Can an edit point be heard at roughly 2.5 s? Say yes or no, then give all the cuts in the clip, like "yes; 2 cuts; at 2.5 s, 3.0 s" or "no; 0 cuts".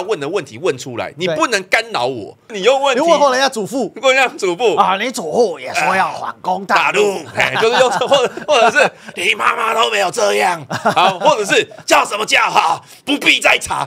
yes; 1 cut; at 2.5 s